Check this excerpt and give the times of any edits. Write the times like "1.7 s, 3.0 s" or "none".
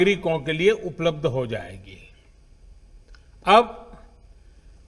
2.3 s